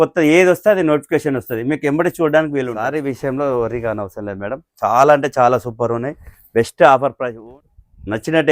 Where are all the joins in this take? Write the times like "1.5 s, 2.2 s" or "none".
2.8 s, 7.3 s